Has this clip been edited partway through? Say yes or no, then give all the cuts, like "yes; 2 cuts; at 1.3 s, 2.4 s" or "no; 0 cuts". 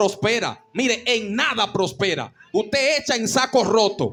no; 0 cuts